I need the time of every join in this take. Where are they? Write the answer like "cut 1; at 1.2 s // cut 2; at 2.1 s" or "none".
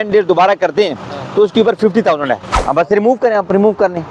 cut 1; at 2.5 s